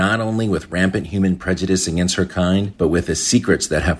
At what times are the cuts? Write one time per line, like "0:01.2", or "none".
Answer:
none